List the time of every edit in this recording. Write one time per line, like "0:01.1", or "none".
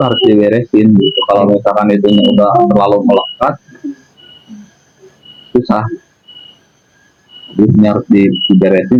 none